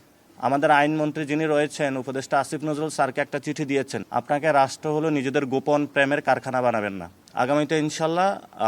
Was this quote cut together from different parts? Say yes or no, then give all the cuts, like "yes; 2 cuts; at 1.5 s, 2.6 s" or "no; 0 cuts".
yes; 2 cuts; at 4.0 s, 7.2 s